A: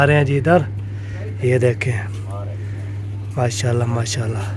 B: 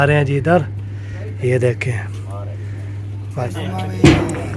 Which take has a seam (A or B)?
B